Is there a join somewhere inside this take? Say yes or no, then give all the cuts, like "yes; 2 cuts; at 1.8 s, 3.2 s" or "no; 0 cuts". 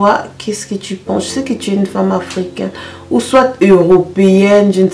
no; 0 cuts